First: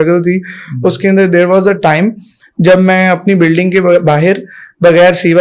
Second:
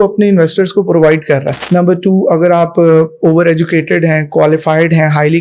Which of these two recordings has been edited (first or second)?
second